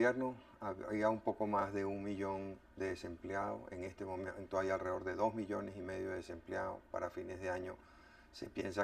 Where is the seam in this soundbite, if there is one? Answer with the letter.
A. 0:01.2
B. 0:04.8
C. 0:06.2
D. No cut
C